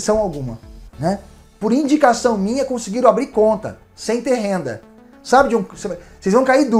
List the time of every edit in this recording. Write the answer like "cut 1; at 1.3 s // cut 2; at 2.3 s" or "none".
cut 1; at 1.4 s